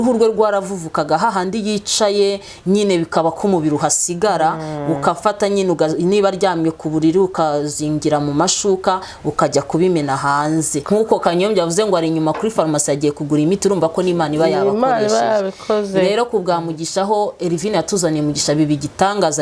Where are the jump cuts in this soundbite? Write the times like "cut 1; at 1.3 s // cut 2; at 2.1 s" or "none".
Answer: cut 1; at 10.8 s